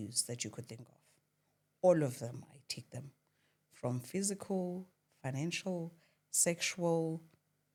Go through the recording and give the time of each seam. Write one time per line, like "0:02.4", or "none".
none